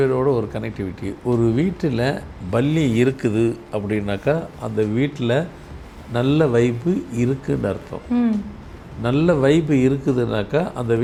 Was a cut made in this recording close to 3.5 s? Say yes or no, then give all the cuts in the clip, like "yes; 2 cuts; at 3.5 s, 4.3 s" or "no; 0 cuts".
no; 0 cuts